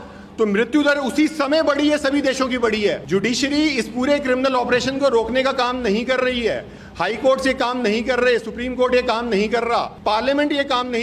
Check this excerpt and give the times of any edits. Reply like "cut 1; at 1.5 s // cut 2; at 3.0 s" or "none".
cut 1; at 3.0 s // cut 2; at 9.9 s